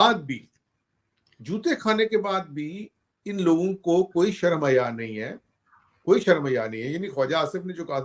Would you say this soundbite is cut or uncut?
uncut